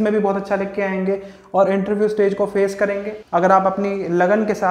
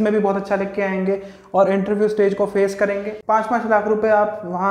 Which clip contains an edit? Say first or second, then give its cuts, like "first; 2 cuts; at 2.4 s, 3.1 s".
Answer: second; 1 cut; at 3.1 s